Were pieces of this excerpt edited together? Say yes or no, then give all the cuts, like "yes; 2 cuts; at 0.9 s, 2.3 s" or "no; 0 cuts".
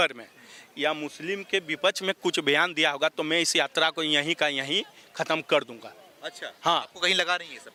no; 0 cuts